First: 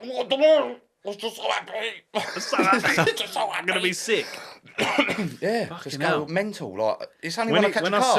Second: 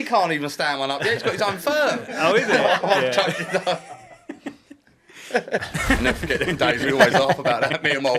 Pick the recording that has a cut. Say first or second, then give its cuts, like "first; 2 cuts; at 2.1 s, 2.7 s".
second; 1 cut; at 5.6 s